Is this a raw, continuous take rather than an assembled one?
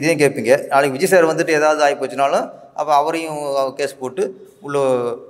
yes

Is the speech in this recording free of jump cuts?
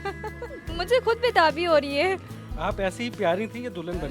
no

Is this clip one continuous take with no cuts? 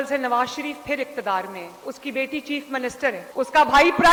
yes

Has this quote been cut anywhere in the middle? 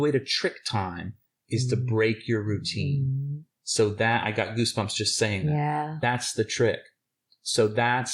yes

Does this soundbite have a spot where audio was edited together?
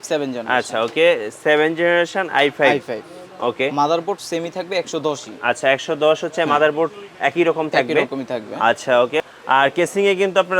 yes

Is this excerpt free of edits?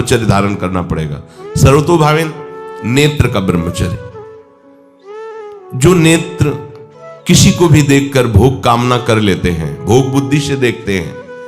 yes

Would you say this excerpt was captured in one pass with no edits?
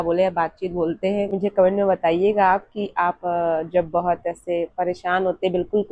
no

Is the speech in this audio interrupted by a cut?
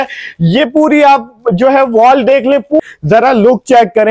yes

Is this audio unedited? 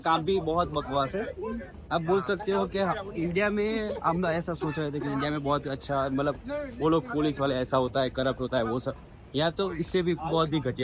yes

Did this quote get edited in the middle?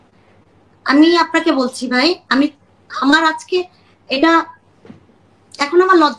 no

